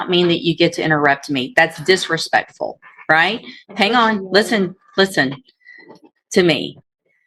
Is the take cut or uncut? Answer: uncut